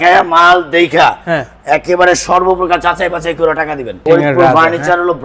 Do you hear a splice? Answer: yes; 1 cut; at 4.0 s

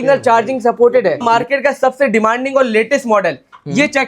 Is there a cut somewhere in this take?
yes; 1 cut; at 1.2 s

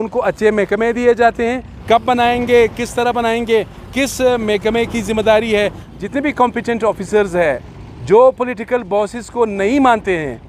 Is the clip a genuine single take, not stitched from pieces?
no; 2 cuts; at 1.7 s, 5.8 s

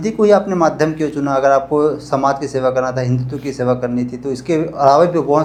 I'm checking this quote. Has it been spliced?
no; 0 cuts

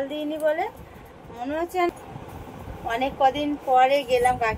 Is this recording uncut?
no; 1 cut; at 1.9 s

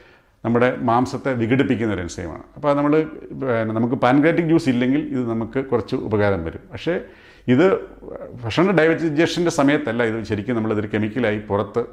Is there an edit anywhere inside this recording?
no; 0 cuts

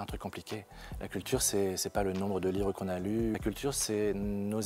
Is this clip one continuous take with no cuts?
no; 1 cut; at 3.4 s

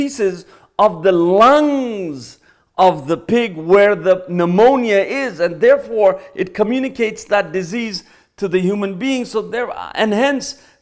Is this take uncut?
yes; 0 cuts

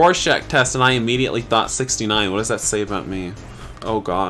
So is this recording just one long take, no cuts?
yes; 0 cuts

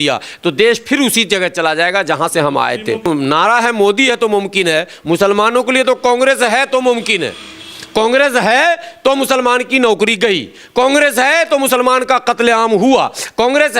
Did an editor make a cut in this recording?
yes; 1 cut; at 3.1 s

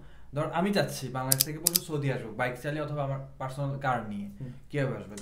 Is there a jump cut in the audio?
no; 0 cuts

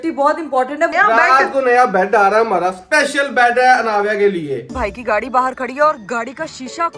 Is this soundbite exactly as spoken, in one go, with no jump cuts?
no; 2 cuts; at 0.9 s, 4.7 s

